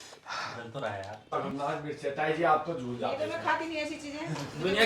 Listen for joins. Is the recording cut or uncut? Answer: cut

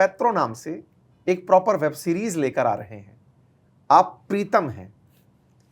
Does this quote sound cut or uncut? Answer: uncut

